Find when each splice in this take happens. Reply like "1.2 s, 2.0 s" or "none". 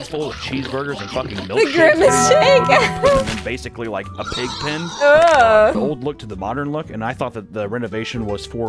5.8 s